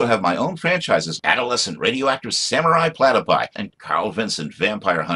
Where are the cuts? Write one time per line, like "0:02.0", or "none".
none